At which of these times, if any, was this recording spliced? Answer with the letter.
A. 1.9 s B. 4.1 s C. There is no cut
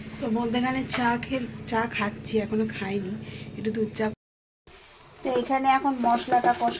B